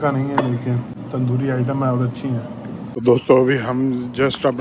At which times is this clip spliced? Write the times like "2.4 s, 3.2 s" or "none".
0.9 s, 2.9 s